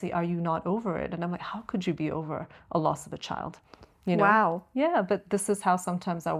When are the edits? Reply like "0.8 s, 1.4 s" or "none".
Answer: none